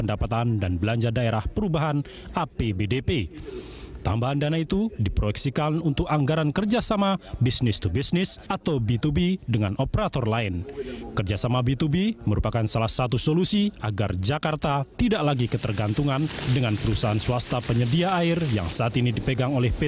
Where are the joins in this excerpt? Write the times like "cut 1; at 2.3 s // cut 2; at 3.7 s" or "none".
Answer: cut 1; at 13.8 s